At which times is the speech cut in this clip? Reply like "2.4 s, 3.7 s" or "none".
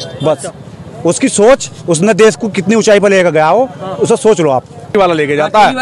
4.9 s